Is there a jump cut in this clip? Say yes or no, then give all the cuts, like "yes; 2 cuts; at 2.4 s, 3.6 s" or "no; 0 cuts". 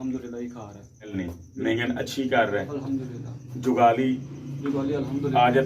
yes; 1 cut; at 1.1 s